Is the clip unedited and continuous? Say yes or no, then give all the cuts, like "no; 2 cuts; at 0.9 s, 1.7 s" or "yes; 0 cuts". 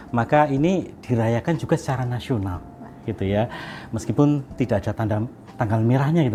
yes; 0 cuts